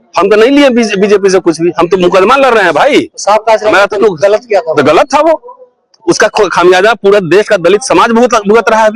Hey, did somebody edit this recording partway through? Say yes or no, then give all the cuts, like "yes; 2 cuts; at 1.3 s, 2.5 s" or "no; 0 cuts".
no; 0 cuts